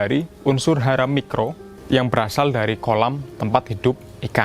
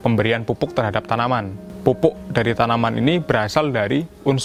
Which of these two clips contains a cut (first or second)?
first